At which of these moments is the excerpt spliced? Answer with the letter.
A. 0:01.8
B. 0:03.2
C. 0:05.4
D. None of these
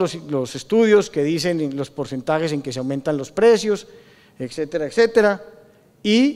B